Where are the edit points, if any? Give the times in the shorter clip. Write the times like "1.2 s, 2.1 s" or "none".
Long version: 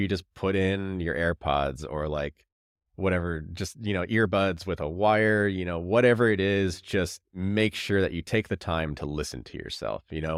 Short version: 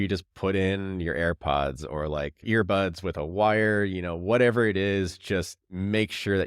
2.4 s